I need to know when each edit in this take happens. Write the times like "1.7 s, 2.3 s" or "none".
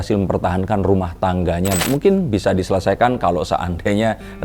1.8 s